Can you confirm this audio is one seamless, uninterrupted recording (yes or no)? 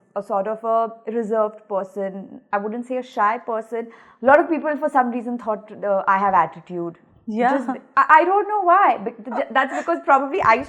yes